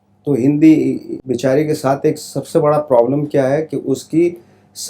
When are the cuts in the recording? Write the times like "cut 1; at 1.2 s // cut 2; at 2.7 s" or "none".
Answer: cut 1; at 1.1 s